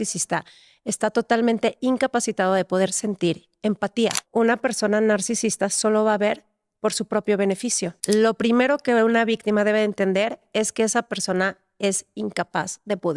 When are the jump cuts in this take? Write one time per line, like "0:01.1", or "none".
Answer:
0:04.2
0:08.0